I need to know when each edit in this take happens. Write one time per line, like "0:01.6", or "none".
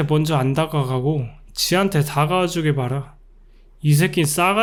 none